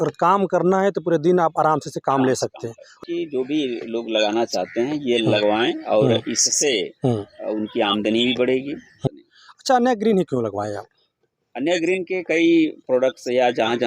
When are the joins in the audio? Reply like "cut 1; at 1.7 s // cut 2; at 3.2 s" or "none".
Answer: cut 1; at 3.0 s // cut 2; at 9.0 s